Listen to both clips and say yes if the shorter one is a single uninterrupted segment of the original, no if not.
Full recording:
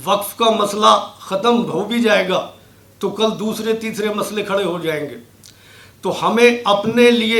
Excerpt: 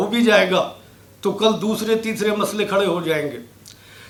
yes